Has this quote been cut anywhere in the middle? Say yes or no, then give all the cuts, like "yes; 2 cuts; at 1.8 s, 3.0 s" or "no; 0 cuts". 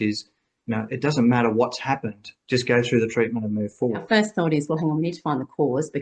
yes; 1 cut; at 4.0 s